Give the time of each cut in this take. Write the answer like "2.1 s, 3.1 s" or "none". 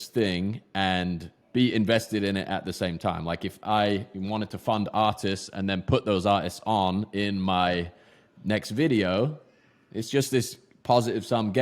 1.3 s